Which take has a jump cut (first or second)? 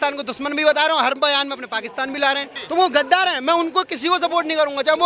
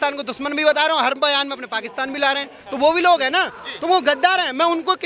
first